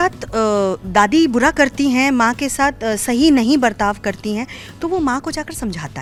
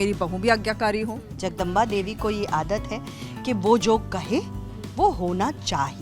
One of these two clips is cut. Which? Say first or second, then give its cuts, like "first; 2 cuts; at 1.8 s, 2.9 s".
second; 1 cut; at 1.2 s